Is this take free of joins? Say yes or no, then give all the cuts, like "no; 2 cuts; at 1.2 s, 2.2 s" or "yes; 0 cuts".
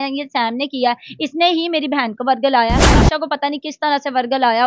no; 1 cut; at 3.0 s